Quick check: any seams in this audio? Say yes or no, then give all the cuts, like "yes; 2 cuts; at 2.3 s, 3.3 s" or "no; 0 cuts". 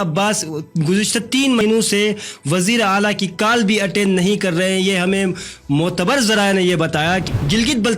yes; 2 cuts; at 1.6 s, 7.2 s